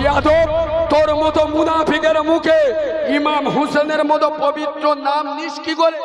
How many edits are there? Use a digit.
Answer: 0